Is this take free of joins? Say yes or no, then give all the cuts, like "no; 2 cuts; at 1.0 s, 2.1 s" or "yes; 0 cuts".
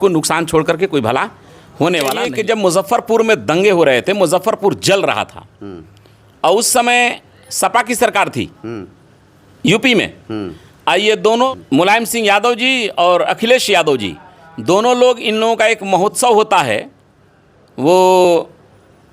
no; 2 cuts; at 2.2 s, 11.5 s